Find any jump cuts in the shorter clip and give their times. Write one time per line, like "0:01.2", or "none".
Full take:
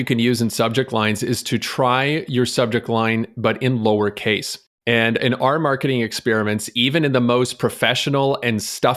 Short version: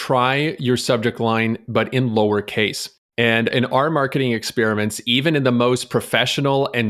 none